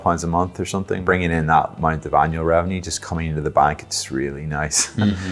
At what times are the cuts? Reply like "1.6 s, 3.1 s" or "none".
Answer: 0.9 s